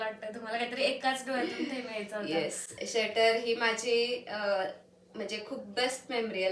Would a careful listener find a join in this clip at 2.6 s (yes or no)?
no